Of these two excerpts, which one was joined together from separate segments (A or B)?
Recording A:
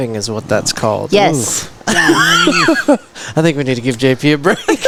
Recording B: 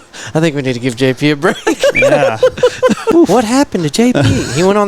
B